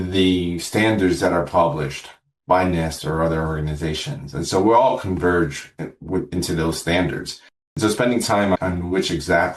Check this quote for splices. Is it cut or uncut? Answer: cut